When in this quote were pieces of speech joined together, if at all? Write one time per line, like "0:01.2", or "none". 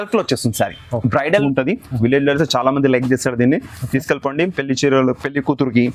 0:01.4